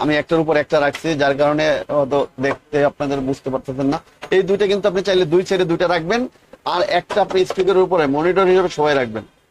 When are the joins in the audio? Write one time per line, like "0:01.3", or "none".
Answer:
none